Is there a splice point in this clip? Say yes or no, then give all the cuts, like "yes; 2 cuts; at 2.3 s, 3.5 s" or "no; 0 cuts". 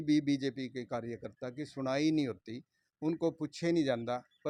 no; 0 cuts